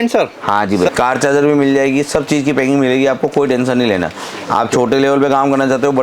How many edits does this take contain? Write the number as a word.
one